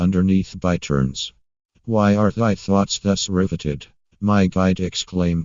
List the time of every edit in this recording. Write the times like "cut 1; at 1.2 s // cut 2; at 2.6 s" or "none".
cut 1; at 3.5 s